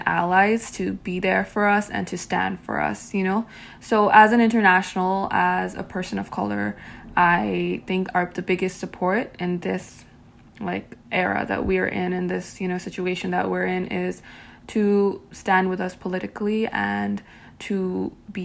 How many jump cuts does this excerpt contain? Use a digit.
0